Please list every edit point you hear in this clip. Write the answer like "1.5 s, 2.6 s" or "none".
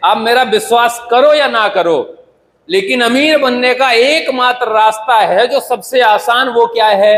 none